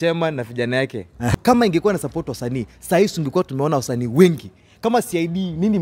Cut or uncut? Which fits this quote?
cut